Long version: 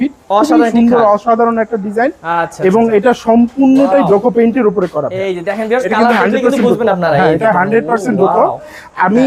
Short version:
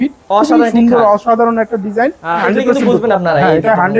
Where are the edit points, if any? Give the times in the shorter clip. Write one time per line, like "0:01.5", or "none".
0:02.4